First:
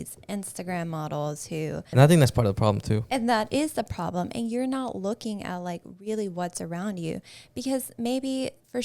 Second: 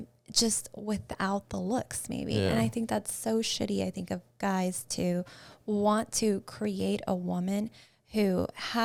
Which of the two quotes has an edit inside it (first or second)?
first